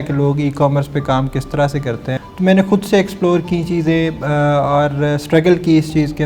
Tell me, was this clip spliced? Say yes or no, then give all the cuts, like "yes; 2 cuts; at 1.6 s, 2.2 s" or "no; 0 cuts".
yes; 1 cut; at 2.1 s